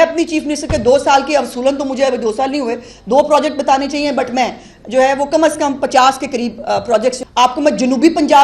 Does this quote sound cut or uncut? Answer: cut